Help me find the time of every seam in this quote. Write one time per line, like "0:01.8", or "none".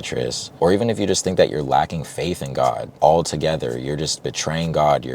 0:02.9